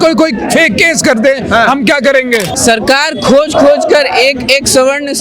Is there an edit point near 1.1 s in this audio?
no; 1 cut; at 2.5 s

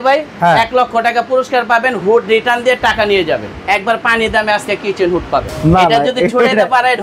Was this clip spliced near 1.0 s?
no; 2 cuts; at 3.5 s, 5.5 s

